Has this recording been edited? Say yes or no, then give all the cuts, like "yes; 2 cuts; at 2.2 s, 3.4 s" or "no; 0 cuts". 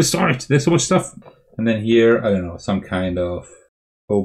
yes; 1 cut; at 1.2 s